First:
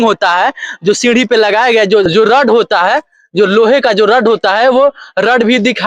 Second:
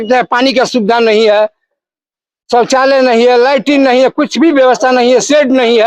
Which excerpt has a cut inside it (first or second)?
first